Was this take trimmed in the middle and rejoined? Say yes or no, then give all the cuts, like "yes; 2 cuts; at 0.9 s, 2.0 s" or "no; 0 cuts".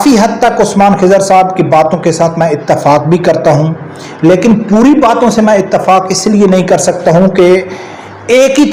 no; 0 cuts